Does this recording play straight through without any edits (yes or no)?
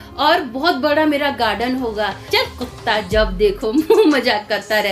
no